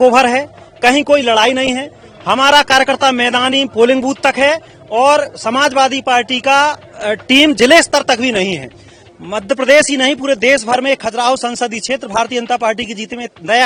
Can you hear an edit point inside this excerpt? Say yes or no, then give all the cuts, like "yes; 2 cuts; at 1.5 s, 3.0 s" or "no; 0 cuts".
no; 0 cuts